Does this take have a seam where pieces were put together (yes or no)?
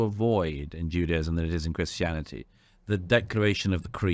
no